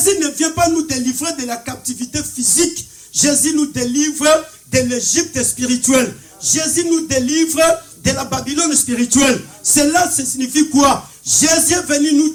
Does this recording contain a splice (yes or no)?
no